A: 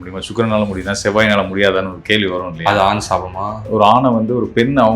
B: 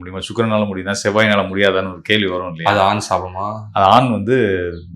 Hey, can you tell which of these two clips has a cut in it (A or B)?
A